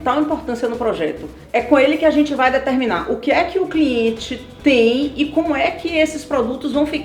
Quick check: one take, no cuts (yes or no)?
no